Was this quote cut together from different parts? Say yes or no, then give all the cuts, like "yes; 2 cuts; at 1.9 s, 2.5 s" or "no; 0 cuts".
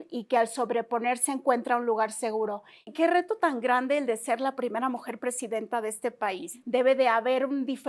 yes; 2 cuts; at 2.9 s, 6.5 s